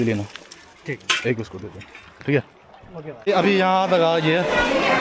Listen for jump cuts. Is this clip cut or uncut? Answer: cut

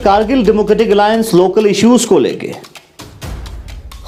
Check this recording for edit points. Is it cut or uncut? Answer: uncut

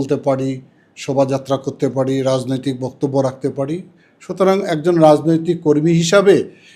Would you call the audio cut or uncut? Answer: uncut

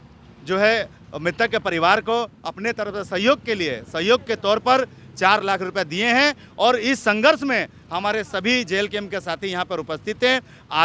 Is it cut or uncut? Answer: uncut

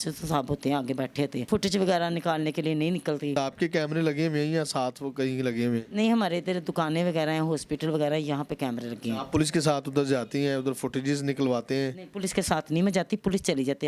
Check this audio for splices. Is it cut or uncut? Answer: uncut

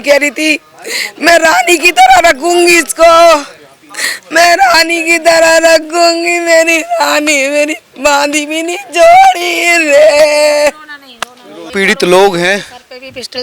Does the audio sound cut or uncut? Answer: cut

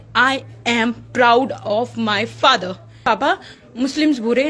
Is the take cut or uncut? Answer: cut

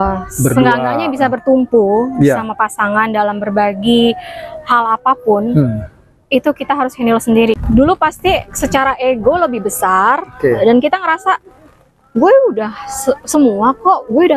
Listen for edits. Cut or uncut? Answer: cut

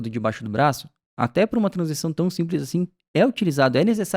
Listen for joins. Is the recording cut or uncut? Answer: uncut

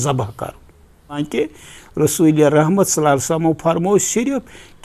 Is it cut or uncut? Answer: cut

